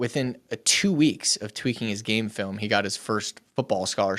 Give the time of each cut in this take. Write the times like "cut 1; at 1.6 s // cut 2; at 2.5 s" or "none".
none